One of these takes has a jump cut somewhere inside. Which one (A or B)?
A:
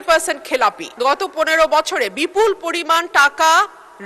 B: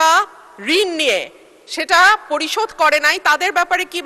A